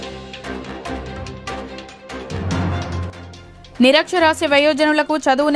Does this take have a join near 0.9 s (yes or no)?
yes